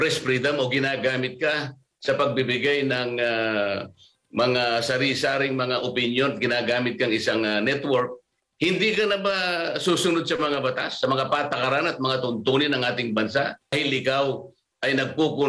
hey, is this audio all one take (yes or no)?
no